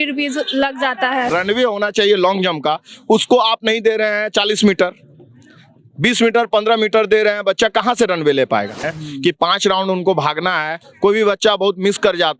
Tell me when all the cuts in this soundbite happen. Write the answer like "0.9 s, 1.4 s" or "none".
1.3 s, 8.8 s